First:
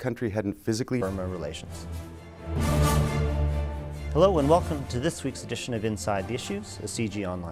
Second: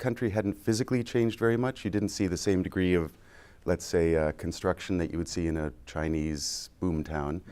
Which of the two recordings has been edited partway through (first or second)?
second